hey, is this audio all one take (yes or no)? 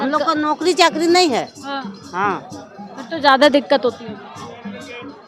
yes